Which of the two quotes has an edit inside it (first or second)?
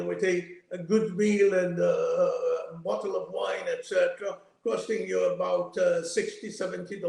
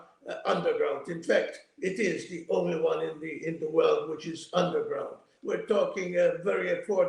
second